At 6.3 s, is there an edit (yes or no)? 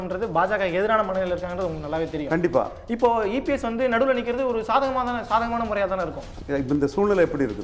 yes